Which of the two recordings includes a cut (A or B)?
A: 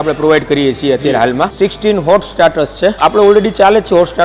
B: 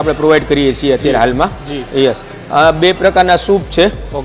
A